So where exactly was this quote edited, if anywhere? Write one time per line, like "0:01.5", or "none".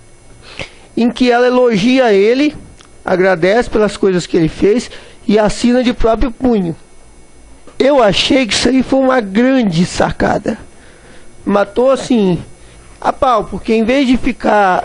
0:01.7